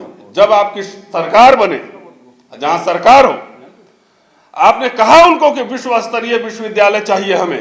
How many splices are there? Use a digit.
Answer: 0